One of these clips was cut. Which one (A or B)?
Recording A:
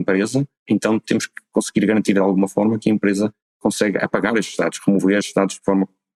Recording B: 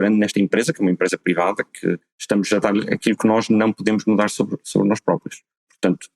B